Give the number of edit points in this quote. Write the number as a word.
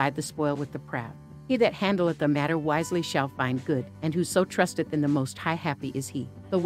one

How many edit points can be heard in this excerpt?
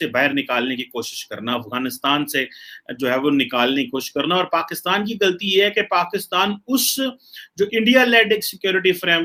zero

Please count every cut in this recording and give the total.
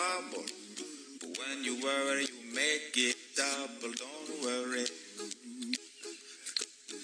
zero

